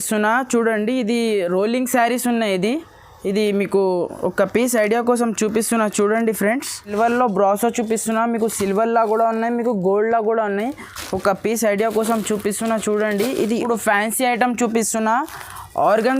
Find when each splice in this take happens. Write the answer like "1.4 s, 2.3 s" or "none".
6.9 s, 13.6 s

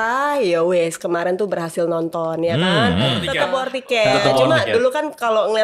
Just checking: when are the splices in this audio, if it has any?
3.2 s

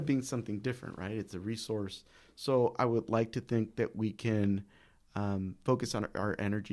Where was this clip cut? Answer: none

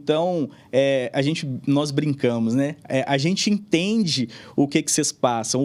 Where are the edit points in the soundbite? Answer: none

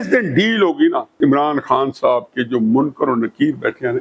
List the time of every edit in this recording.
1.1 s

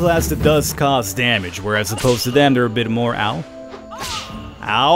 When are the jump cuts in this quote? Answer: none

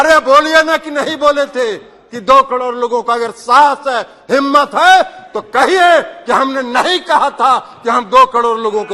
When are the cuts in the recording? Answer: none

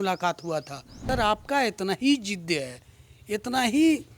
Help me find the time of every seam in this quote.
1.1 s

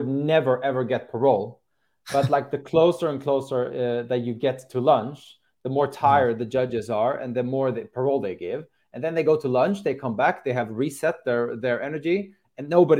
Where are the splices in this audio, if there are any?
none

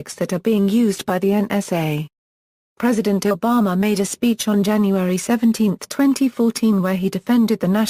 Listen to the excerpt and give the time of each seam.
none

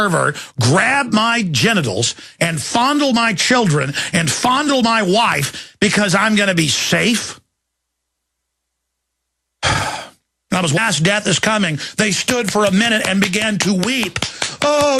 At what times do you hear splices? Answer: none

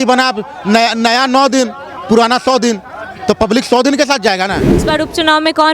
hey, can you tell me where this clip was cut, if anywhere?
4.8 s

